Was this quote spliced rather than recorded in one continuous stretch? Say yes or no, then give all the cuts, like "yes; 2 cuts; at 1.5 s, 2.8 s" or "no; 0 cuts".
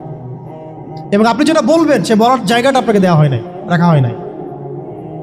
yes; 1 cut; at 1.1 s